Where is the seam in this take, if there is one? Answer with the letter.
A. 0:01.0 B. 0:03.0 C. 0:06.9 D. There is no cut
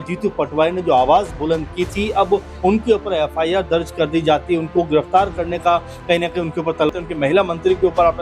C